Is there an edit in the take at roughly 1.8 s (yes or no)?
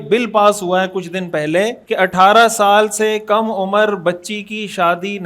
yes